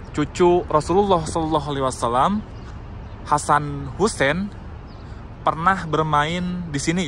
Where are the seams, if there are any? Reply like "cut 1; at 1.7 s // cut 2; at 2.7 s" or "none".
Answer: none